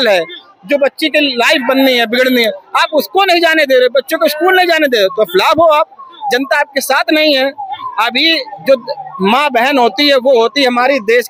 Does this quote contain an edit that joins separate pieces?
no; 0 cuts

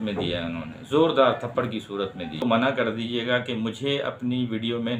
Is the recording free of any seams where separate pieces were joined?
no; 1 cut; at 2.4 s

